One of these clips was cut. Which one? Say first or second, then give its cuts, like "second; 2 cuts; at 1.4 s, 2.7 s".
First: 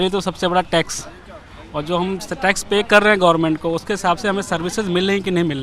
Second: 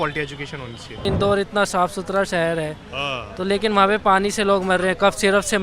second; 1 cut; at 1.1 s